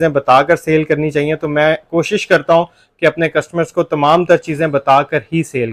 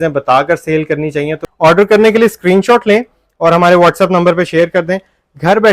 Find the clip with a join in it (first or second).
second